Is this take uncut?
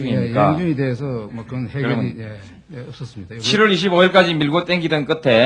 no; 1 cut; at 4.5 s

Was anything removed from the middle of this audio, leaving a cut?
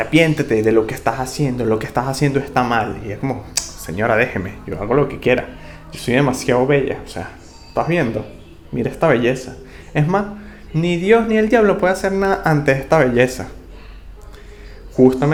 no; 0 cuts

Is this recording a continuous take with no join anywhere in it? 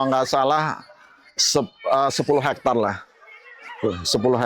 yes; 0 cuts

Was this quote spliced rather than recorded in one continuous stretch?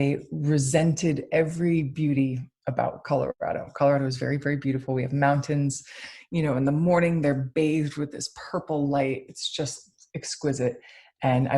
no; 0 cuts

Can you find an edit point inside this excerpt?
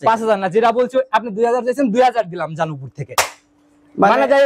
no; 0 cuts

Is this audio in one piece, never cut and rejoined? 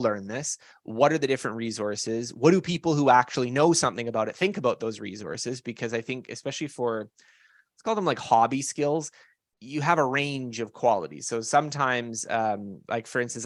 yes; 0 cuts

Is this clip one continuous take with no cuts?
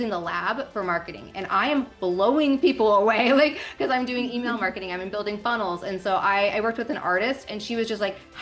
yes; 0 cuts

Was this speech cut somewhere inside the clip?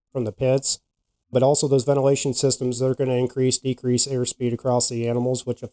no; 0 cuts

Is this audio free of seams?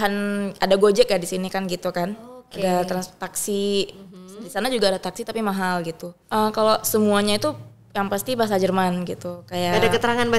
no; 1 cut; at 6.1 s

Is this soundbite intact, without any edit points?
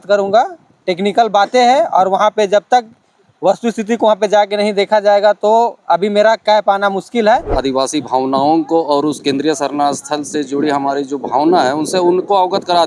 no; 1 cut; at 7.5 s

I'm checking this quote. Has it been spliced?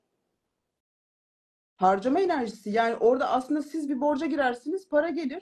no; 0 cuts

